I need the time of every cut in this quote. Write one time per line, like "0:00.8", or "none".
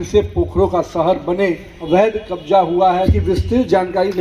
0:01.7
0:03.1